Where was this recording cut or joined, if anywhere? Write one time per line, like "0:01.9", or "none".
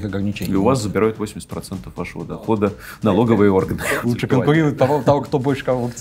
0:03.8